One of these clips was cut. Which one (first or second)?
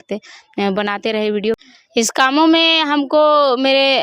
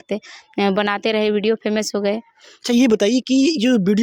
first